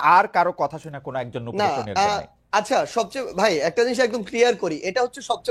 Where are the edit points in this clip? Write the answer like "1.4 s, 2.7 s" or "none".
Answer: none